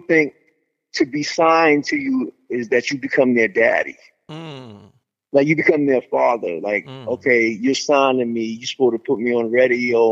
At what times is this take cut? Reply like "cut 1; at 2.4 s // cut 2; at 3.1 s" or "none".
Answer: none